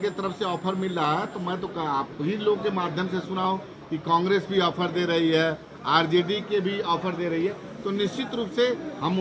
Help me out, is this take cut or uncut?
uncut